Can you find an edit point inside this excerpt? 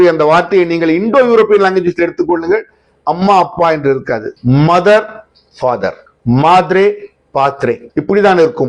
yes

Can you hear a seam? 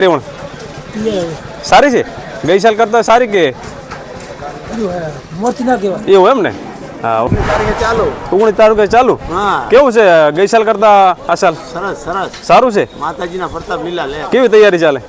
yes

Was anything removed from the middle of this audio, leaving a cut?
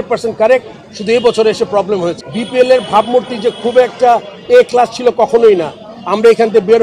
yes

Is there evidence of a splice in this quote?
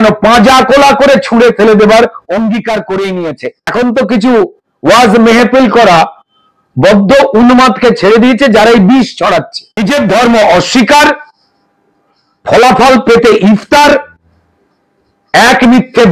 yes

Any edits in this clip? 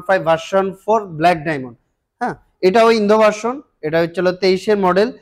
no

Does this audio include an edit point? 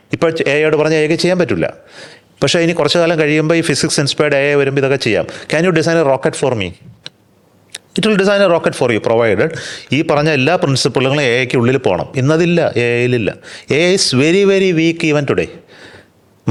no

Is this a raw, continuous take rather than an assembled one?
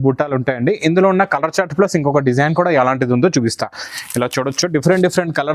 no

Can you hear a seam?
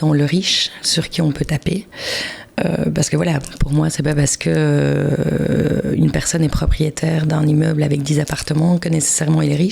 no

